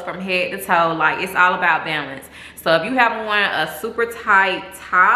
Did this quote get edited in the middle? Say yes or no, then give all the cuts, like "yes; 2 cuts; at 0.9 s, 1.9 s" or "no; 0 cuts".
no; 0 cuts